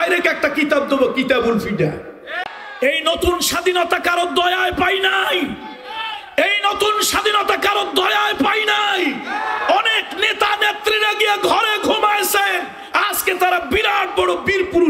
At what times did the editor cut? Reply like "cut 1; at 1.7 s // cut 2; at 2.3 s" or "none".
cut 1; at 2.6 s